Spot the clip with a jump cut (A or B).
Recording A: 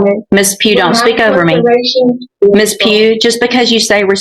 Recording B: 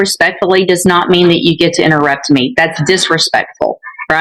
A